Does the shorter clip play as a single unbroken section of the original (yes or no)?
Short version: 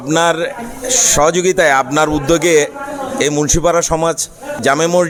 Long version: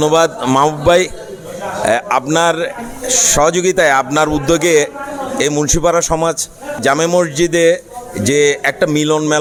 yes